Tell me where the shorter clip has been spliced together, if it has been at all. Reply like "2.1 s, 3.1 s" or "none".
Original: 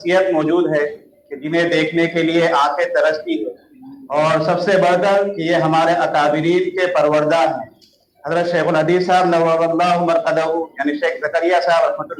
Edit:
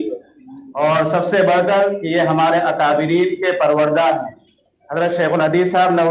none

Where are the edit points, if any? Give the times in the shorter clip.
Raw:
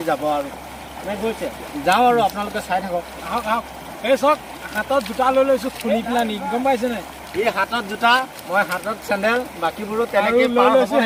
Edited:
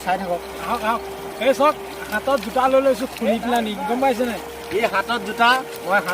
none

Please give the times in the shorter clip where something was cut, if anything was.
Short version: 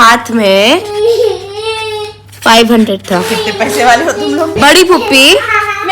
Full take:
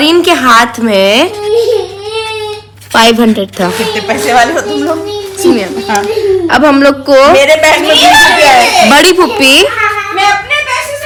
4.6 s

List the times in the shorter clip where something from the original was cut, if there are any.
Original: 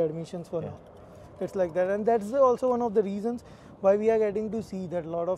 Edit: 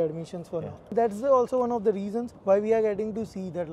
0.9 s, 2.3 s

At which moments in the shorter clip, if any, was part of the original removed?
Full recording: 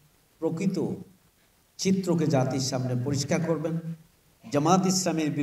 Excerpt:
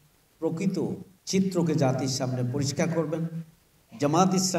1.1 s

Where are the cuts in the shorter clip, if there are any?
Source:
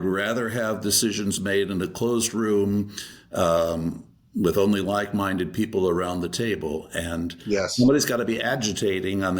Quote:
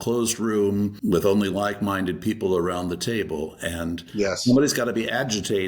1.0 s

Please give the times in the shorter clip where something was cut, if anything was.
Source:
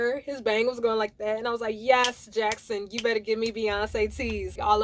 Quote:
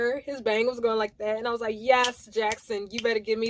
none

